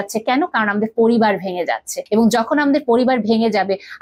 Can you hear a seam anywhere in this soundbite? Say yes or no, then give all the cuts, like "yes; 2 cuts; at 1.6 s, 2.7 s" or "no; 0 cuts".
yes; 1 cut; at 1.9 s